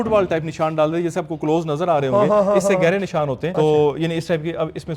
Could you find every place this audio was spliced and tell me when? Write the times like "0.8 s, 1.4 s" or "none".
3.4 s